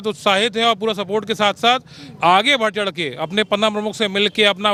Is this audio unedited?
yes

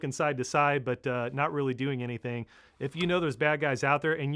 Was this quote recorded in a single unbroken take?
no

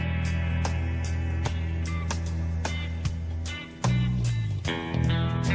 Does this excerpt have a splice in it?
no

